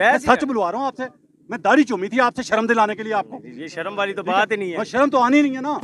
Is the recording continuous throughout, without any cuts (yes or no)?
yes